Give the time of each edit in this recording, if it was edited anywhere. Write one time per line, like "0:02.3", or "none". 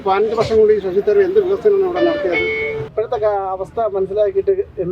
0:02.9